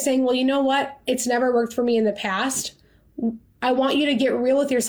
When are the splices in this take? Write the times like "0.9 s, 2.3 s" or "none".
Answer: none